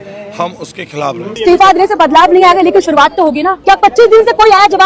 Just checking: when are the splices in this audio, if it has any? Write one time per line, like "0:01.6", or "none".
0:01.3
0:03.5